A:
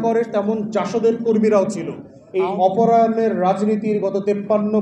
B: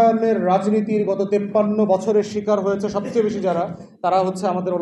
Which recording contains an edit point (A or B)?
A